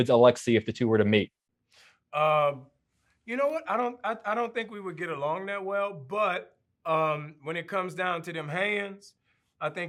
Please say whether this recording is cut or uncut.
uncut